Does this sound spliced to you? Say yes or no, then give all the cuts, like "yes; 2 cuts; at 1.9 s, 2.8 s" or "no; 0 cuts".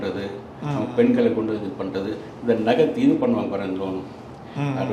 no; 0 cuts